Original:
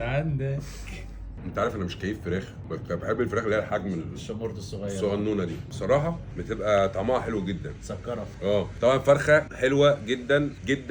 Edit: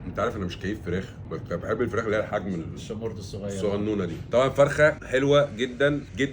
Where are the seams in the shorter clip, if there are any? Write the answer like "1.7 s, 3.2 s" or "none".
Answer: 4.2 s

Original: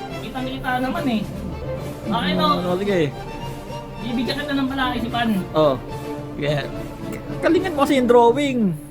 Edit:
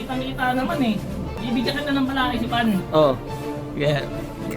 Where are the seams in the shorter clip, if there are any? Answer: 1.3 s

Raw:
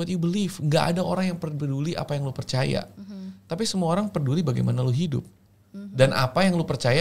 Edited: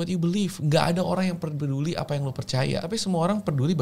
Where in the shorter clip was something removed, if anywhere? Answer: 2.8 s

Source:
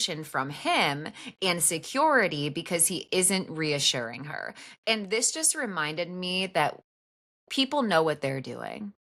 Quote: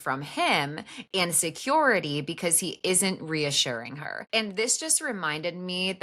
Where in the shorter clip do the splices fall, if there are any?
4.1 s

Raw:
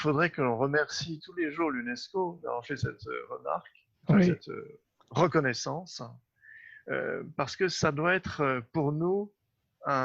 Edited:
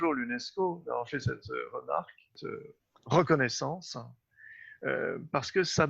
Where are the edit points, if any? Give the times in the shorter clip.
2.4 s

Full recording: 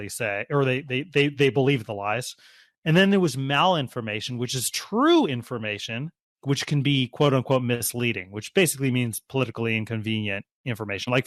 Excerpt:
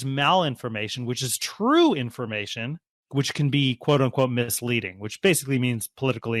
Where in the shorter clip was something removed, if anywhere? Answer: none

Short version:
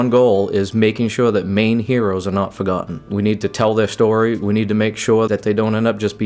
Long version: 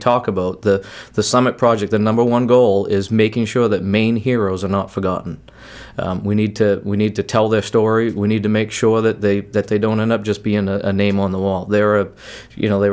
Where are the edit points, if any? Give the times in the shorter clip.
3.1 s, 5.3 s

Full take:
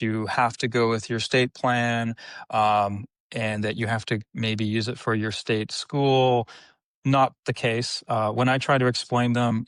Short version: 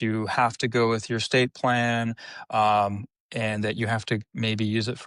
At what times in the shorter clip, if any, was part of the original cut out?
none

